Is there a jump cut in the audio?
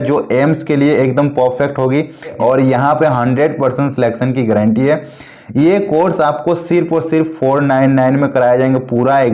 yes; 1 cut; at 2.4 s

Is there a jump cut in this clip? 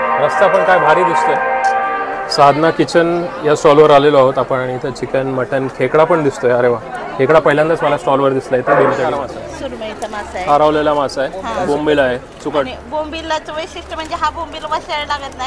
yes; 2 cuts; at 2.0 s, 9.1 s

